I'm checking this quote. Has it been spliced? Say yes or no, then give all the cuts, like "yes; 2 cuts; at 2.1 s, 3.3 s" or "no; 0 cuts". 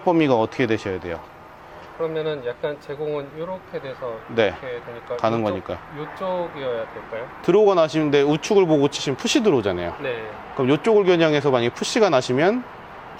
no; 0 cuts